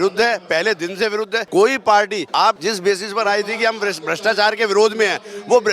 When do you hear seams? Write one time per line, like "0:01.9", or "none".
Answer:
0:01.4
0:02.4